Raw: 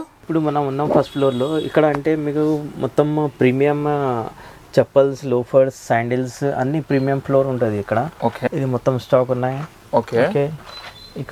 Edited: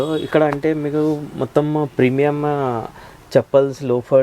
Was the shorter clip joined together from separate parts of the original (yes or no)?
no